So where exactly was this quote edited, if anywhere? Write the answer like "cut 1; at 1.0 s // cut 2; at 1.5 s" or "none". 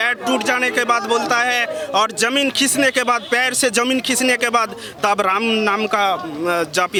none

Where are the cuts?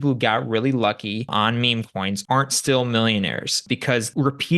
cut 1; at 1.6 s // cut 2; at 3.6 s

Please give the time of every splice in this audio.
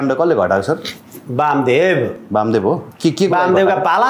cut 1; at 2.9 s

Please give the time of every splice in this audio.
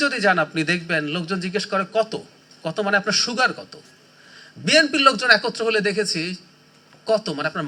none

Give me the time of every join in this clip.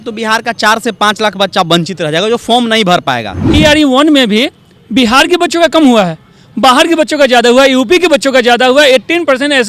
cut 1; at 3.4 s

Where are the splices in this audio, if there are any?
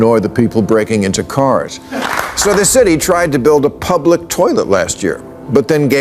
cut 1; at 2.0 s

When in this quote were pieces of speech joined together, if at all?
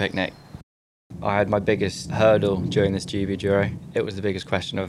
cut 1; at 0.9 s // cut 2; at 2.0 s // cut 3; at 3.8 s

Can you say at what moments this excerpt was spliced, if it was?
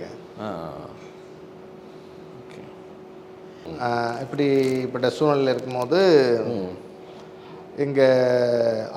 none

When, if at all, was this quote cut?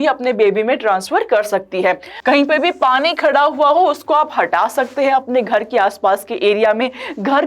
cut 1; at 2.1 s

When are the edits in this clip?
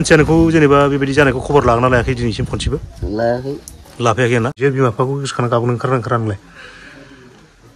cut 1; at 4.5 s

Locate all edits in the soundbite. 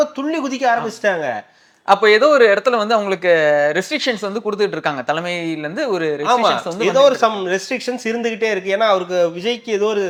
none

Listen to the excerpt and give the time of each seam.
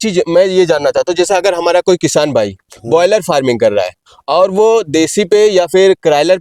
none

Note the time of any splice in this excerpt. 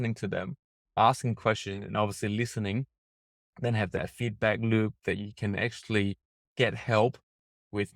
cut 1; at 0.9 s

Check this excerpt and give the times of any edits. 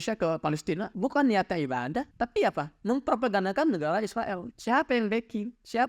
cut 1; at 0.9 s // cut 2; at 2.1 s

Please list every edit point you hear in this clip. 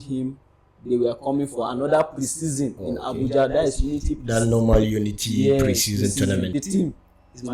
cut 1; at 6.5 s

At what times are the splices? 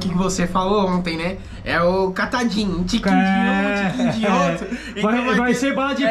none

